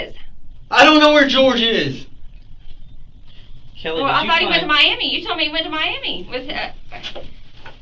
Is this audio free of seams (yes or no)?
yes